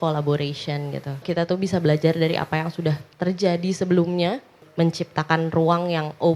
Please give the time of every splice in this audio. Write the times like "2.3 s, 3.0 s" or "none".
1.2 s, 4.6 s